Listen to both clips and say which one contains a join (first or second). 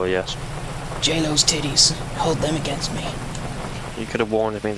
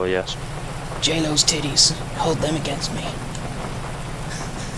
first